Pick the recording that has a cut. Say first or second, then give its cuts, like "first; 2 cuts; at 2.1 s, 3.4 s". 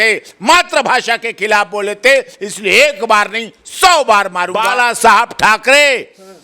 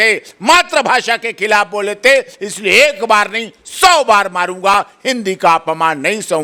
first; 1 cut; at 4.7 s